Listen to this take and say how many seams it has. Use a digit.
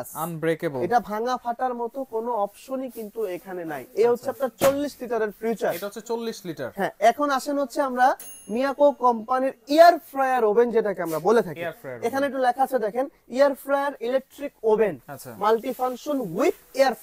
0